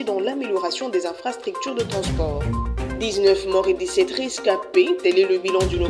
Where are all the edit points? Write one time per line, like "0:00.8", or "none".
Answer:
none